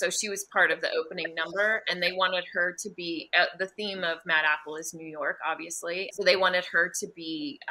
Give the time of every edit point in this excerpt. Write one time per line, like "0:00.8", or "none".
none